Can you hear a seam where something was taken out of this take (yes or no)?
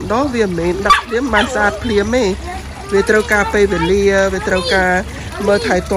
no